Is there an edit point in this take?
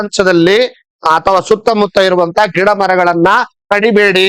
no; 0 cuts

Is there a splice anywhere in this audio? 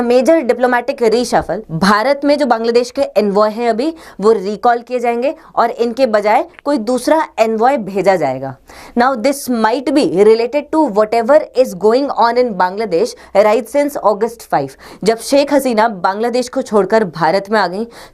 yes; 1 cut; at 1.6 s

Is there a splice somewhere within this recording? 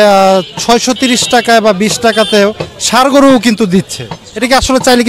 no; 0 cuts

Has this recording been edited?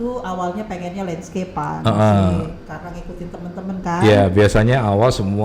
no; 0 cuts

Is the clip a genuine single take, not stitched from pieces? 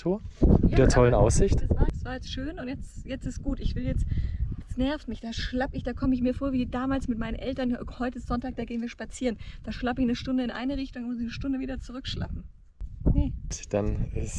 yes; 0 cuts

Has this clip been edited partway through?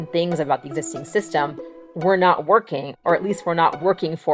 no; 0 cuts

